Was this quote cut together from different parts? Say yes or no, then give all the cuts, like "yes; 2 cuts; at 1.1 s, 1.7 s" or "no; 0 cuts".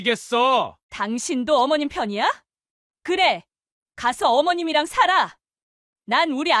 no; 0 cuts